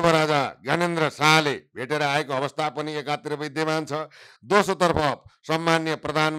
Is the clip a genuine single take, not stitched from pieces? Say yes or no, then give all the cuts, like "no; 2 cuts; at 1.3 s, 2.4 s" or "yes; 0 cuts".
yes; 0 cuts